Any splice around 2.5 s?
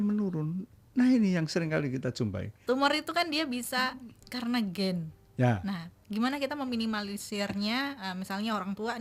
yes; 1 cut; at 2.5 s

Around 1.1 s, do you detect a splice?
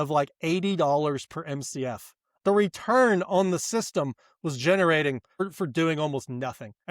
no; 2 cuts; at 2.4 s, 5.4 s

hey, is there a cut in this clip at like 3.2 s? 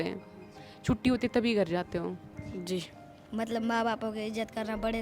yes; 1 cut; at 3.2 s

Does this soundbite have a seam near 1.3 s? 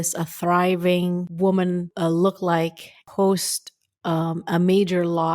yes; 3 cuts; at 1.3 s, 1.9 s, 3.0 s

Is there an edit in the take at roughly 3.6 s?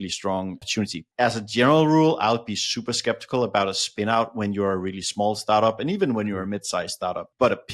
no; 1 cut; at 1.0 s

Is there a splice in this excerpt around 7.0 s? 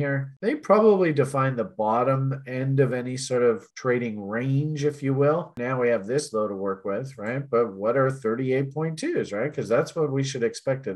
no; 1 cut; at 5.6 s

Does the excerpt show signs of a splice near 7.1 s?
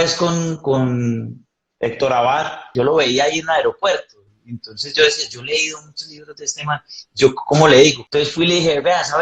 no; 1 cut; at 2.7 s

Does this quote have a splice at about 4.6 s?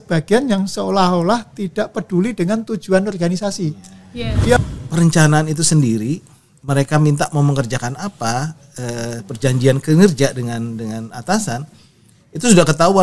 yes; 1 cut; at 4.6 s

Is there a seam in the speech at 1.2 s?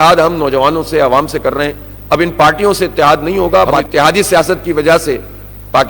no; 1 cut; at 3.8 s

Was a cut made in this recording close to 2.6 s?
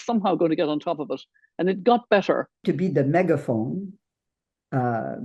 yes; 1 cut; at 2.6 s

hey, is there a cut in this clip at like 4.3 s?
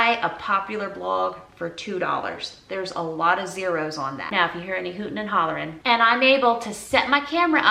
no; 0 cuts

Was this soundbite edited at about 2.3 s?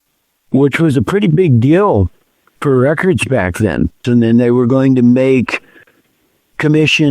no; 1 cut; at 4.0 s

